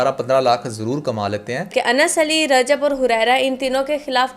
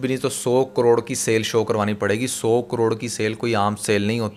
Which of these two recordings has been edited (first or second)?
first